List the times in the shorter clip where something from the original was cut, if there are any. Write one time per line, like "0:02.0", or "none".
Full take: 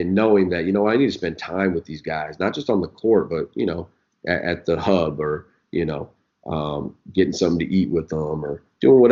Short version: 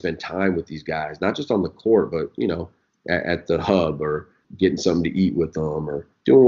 0:04.4